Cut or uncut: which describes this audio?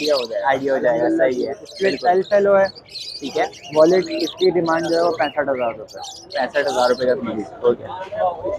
uncut